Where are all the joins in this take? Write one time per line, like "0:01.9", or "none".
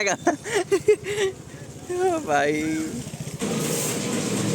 0:03.4